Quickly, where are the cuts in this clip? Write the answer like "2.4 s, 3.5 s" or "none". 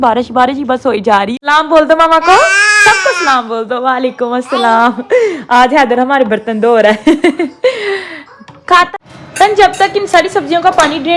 1.3 s, 8.9 s